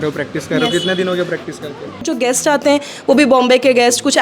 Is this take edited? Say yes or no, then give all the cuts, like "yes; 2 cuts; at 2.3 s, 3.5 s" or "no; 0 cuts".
yes; 1 cut; at 2.1 s